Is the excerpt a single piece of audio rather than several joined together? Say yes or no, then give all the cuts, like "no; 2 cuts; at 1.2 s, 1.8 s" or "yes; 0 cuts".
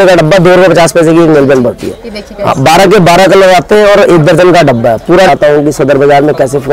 no; 1 cut; at 5.3 s